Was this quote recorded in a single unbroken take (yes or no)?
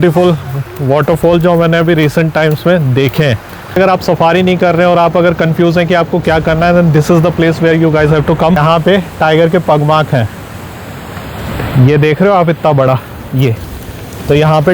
no